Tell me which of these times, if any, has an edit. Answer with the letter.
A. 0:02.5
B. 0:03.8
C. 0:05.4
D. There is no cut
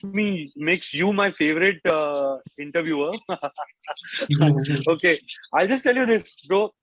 D